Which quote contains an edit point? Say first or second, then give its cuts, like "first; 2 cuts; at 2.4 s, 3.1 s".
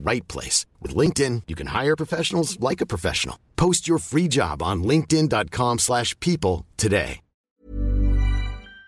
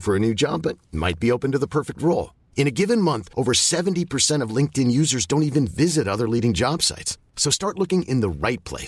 first; 1 cut; at 7.5 s